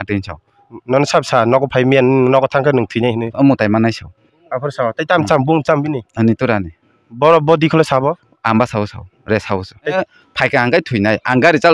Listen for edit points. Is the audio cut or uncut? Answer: cut